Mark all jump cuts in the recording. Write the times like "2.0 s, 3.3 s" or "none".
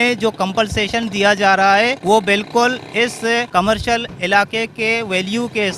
2.0 s, 3.5 s